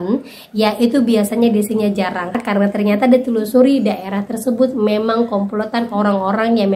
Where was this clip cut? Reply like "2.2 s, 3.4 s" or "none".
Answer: 2.3 s